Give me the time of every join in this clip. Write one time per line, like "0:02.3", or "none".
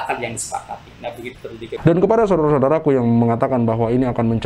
0:01.8